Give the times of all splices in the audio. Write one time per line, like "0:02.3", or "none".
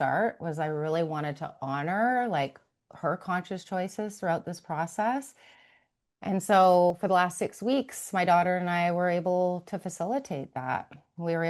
0:06.9